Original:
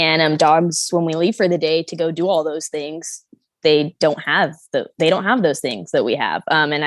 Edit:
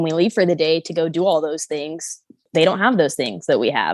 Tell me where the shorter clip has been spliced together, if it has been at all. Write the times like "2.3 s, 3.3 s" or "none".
2.4 s